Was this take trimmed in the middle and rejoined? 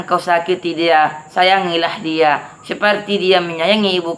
no; 0 cuts

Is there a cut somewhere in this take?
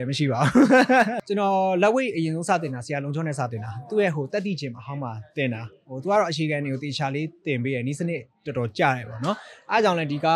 yes; 1 cut; at 1.2 s

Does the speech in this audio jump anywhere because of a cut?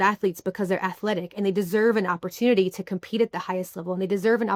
no; 0 cuts

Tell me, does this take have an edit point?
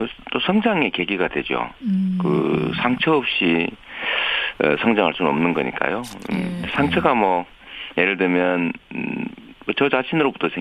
yes; 1 cut; at 9.0 s

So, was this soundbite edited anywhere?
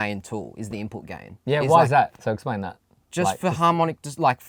no; 0 cuts

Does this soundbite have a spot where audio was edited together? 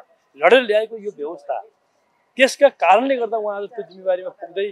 no; 0 cuts

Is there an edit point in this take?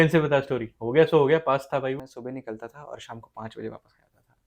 yes; 1 cut; at 2.1 s

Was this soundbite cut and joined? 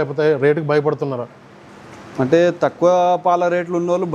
no; 0 cuts

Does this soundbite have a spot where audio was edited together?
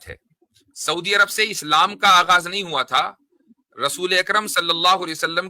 no; 0 cuts

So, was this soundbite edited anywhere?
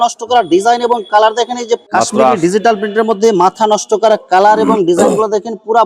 yes; 1 cut; at 1.8 s

